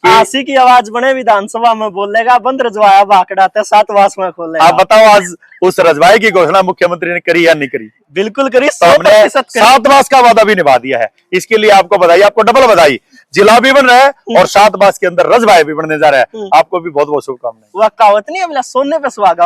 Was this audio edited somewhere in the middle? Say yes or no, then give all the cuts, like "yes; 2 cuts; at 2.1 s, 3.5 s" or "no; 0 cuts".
no; 0 cuts